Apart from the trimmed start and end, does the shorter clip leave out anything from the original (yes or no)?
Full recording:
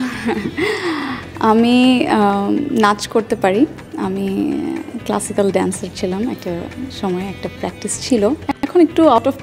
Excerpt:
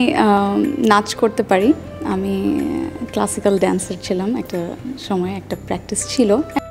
no